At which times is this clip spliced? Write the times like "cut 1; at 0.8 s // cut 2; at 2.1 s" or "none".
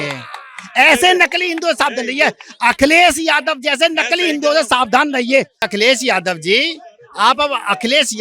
cut 1; at 5.7 s